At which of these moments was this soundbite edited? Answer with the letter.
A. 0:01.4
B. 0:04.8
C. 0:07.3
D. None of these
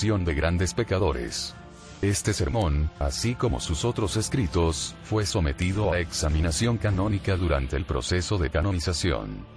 A